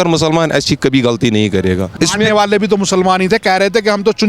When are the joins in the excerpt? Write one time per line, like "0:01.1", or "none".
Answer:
0:01.9